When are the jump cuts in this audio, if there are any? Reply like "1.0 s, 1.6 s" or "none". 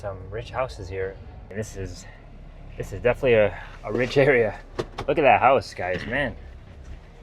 1.5 s